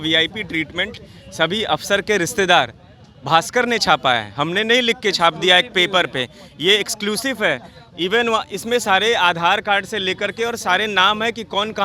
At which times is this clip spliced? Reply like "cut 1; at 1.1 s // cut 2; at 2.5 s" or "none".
none